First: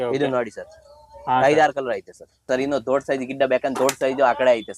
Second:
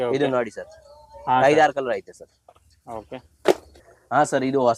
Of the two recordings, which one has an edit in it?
first; 1 cut; at 2.4 s

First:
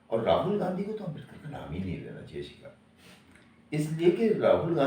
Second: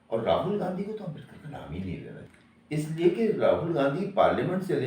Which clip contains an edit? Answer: second; 1 cut; at 2.2 s

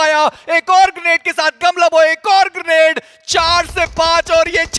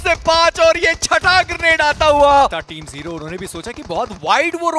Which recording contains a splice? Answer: second; 1 cut; at 2.7 s

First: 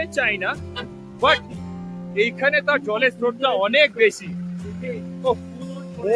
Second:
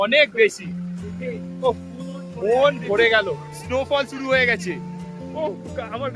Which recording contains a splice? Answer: second; 1 cut; at 3.5 s

